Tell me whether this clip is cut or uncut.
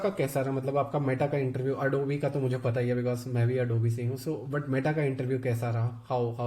uncut